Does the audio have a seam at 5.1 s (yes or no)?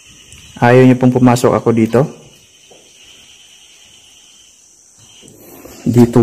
yes